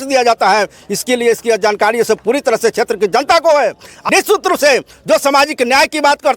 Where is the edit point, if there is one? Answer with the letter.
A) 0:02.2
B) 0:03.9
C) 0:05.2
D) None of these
B